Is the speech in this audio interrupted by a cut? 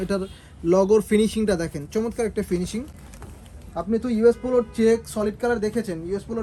no; 0 cuts

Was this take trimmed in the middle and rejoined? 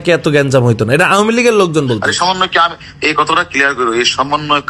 no; 0 cuts

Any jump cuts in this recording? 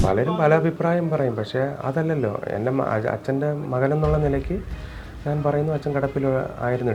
no; 0 cuts

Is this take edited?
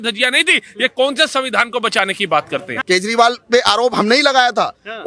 yes; 1 cut; at 2.8 s

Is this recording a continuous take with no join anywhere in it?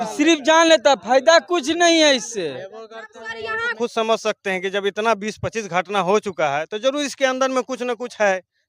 no; 1 cut; at 3.7 s

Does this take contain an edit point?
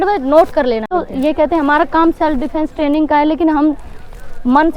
yes; 1 cut; at 0.9 s

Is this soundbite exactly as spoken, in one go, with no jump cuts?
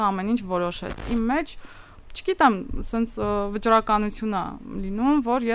no; 1 cut; at 1.0 s

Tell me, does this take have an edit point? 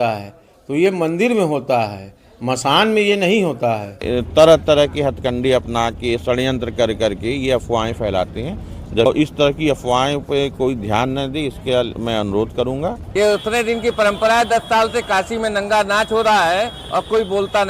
yes; 3 cuts; at 4.0 s, 9.1 s, 13.0 s

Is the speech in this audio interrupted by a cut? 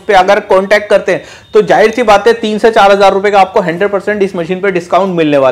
no; 0 cuts

